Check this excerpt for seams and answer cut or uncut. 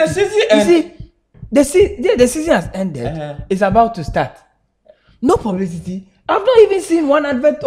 uncut